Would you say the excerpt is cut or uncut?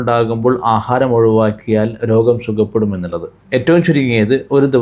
uncut